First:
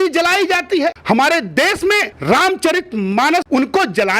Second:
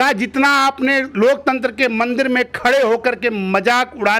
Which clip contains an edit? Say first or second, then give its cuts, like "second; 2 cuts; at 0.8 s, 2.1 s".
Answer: first; 3 cuts; at 1.0 s, 2.1 s, 3.5 s